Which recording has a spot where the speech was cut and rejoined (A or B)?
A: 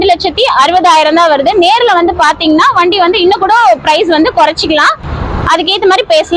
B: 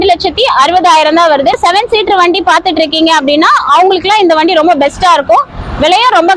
B